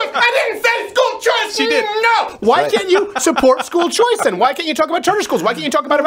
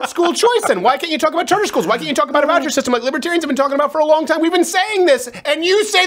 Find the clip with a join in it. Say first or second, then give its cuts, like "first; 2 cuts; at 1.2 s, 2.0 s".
first; 1 cut; at 2.3 s